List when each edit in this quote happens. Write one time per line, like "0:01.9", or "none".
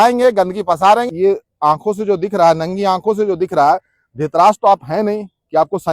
0:01.1

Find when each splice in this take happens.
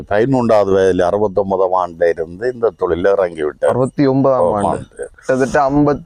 none

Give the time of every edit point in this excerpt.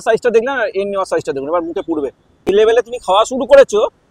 0:02.5

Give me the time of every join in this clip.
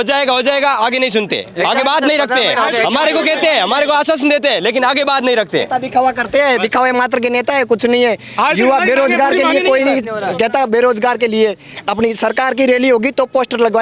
none

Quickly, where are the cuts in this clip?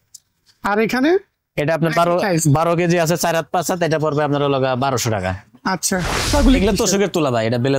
0:06.3

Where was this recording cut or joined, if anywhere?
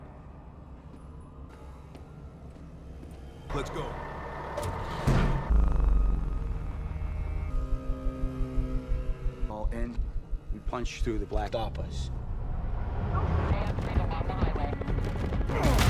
0:13.5

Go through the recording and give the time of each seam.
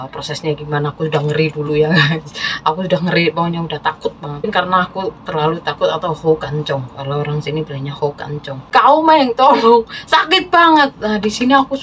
0:04.5
0:08.7

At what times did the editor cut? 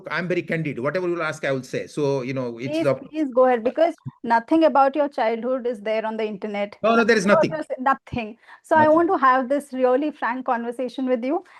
none

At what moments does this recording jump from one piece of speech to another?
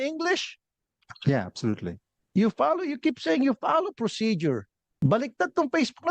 0:04.9

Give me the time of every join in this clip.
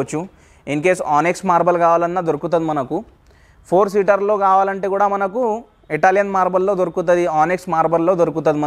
none

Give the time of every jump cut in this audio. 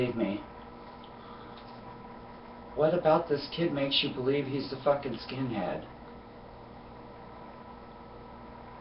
none

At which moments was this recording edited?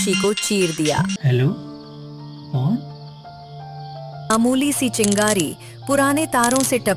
0:01.1
0:04.3

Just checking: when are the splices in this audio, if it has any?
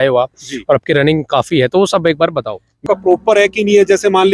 0:02.8

